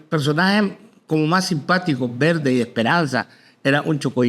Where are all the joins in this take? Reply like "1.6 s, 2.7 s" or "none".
none